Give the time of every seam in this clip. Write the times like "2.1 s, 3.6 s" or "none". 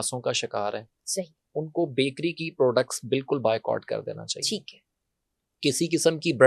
none